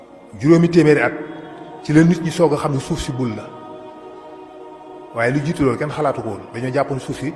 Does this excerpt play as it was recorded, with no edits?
yes; 0 cuts

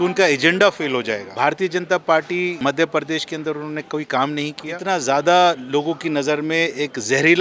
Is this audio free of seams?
no; 3 cuts; at 1.2 s, 2.6 s, 4.7 s

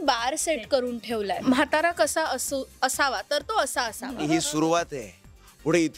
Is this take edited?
yes; 2 cuts; at 1.4 s, 4.2 s

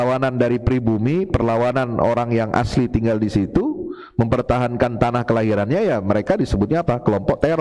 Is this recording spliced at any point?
no; 0 cuts

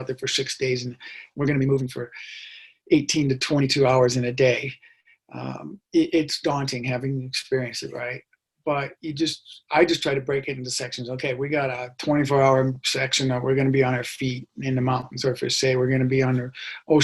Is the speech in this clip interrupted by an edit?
no; 0 cuts

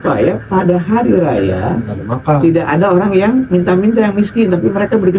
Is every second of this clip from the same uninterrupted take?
yes; 0 cuts

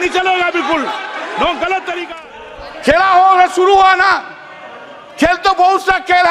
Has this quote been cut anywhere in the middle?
yes; 1 cut; at 2.1 s

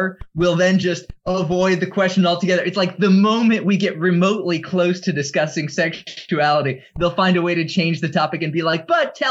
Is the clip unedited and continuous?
yes; 0 cuts

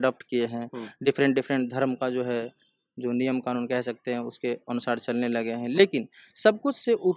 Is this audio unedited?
yes; 0 cuts

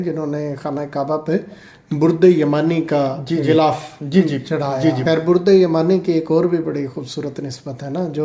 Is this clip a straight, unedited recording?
no; 1 cut; at 5.0 s

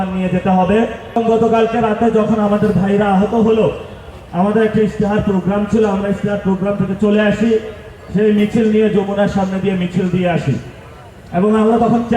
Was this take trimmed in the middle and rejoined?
yes; 1 cut; at 1.2 s

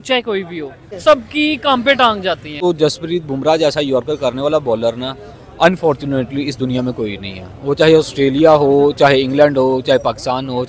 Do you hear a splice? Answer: yes; 2 cuts; at 0.9 s, 2.5 s

